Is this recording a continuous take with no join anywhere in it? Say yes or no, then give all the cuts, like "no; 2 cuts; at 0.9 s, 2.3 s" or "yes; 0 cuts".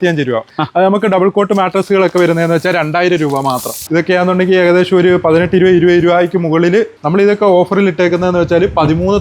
no; 2 cuts; at 3.8 s, 7.0 s